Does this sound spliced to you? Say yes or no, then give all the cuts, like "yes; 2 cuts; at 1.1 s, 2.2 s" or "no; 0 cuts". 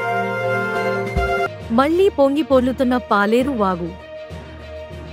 no; 0 cuts